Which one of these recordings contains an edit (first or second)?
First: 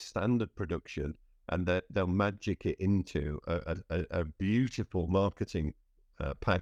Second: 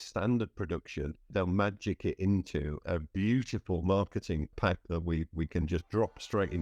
second